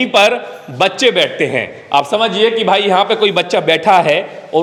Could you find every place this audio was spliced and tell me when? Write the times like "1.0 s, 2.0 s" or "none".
none